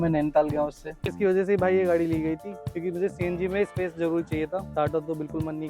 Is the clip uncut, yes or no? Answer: no